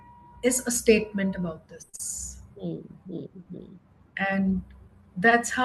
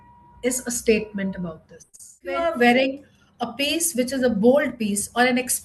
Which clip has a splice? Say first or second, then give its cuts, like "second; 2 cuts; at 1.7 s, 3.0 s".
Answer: second; 1 cut; at 2.4 s